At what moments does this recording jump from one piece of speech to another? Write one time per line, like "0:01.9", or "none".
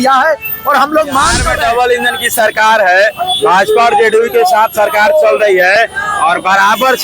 0:01.5